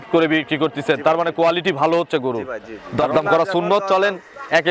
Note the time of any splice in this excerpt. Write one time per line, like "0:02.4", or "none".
0:02.8